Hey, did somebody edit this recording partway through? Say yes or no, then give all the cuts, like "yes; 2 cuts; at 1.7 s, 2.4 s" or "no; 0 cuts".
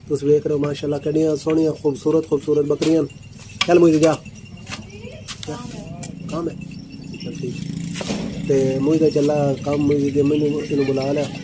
no; 0 cuts